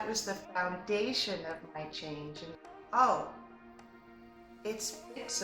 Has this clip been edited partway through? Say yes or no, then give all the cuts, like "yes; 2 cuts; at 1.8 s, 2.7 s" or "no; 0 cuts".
yes; 1 cut; at 2.5 s